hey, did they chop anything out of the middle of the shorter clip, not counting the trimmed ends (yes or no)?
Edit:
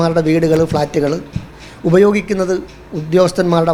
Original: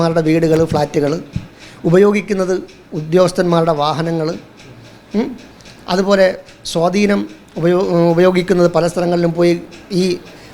no